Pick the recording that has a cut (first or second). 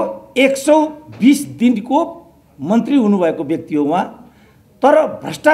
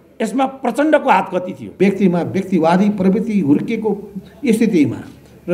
second